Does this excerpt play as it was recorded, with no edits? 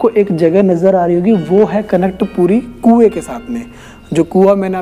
yes; 0 cuts

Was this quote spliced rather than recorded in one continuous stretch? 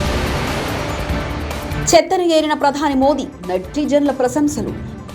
yes; 1 cut; at 1.8 s

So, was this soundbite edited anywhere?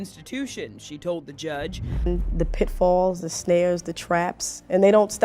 yes; 1 cut; at 2.1 s

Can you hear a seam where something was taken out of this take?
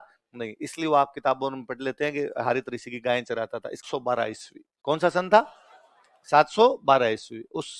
yes; 1 cut; at 3.8 s

